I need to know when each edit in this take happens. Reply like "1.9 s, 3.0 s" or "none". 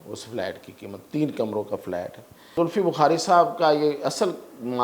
2.5 s